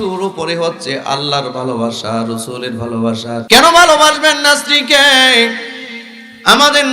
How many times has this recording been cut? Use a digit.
1